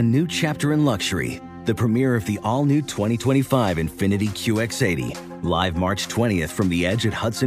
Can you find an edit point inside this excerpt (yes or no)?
no